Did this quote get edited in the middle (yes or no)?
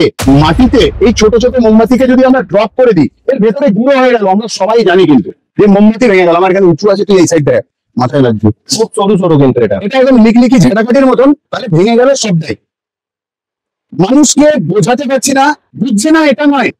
no